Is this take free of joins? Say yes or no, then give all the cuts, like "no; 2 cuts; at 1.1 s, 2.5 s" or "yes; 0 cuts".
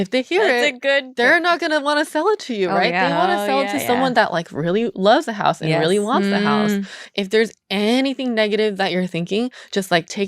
no; 1 cut; at 7.0 s